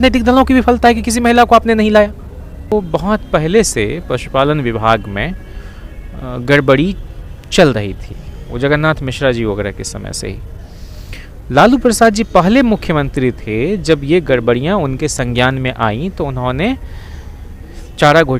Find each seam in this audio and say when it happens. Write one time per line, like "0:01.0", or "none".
0:02.7